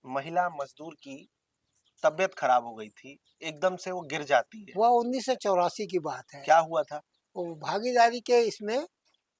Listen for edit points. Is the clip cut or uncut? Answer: uncut